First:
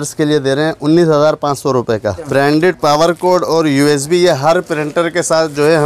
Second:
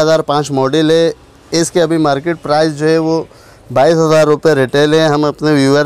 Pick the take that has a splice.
first; 1 cut; at 2.2 s

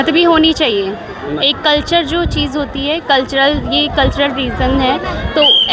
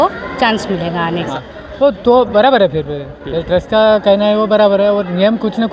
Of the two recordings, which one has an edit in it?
second; 1 cut; at 1.3 s

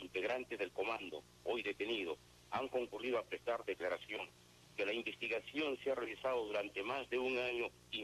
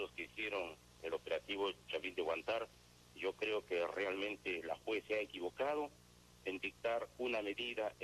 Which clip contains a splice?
second; 1 cut; at 4.6 s

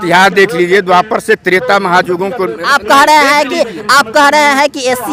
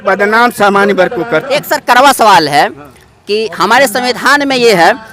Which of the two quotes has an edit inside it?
second; 1 cut; at 1.2 s

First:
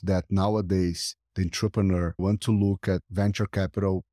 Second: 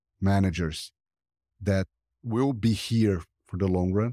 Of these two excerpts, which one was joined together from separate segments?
first; 2 cuts; at 2.2 s, 3.1 s

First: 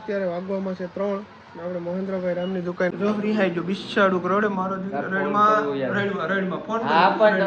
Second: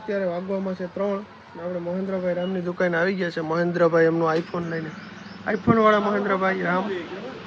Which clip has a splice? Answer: first; 1 cut; at 2.9 s

